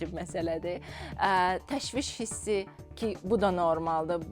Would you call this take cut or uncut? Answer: uncut